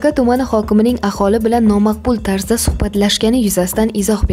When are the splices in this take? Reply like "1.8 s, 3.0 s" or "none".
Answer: none